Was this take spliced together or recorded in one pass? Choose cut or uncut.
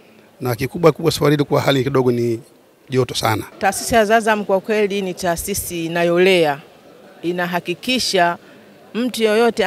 cut